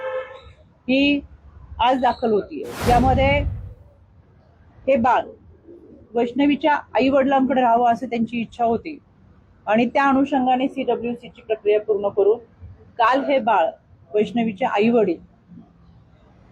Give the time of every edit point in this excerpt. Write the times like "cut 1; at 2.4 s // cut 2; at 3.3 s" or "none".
cut 1; at 2.6 s